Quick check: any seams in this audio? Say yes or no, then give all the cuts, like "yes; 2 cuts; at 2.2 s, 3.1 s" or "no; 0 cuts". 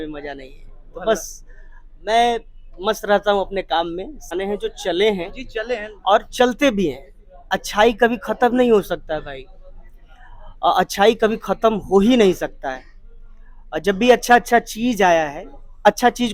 yes; 1 cut; at 4.3 s